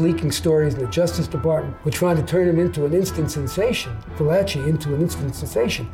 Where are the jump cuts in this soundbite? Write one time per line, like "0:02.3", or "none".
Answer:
0:01.8